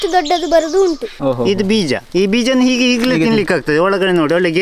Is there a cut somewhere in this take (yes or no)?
yes